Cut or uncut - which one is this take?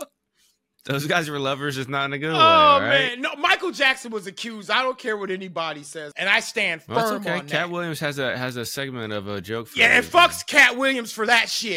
cut